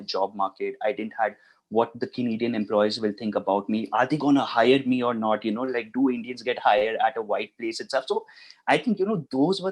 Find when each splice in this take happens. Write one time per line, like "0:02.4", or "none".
none